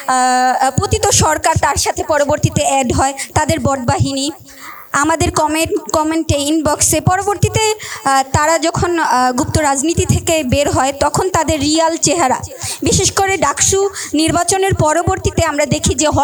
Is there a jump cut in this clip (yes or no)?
no